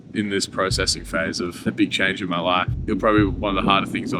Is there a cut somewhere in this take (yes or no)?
yes